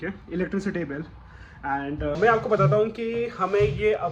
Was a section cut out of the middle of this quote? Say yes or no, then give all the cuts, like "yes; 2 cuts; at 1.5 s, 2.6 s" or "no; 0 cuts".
yes; 1 cut; at 2.2 s